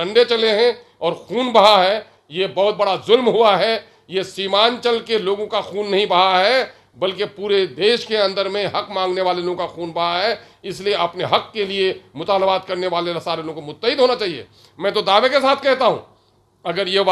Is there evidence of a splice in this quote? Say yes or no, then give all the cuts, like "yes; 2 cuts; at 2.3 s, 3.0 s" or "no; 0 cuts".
no; 0 cuts